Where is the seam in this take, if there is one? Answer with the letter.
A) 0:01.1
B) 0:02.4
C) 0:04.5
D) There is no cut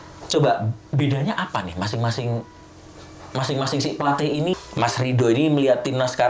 C